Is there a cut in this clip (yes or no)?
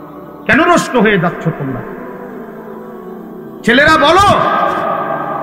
no